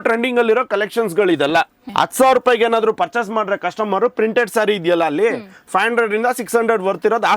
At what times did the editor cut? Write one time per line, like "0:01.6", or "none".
0:01.8